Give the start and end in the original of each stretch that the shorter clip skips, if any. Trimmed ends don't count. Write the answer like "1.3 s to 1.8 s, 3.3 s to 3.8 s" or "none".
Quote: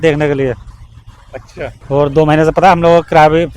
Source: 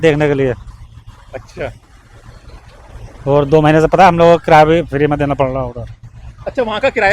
1.8 s to 3.1 s